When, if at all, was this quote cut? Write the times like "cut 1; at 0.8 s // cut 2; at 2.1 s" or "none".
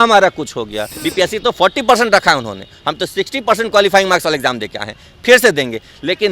cut 1; at 1.0 s